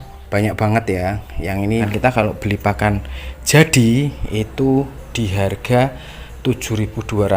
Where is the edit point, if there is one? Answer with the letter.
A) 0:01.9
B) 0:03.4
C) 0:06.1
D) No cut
A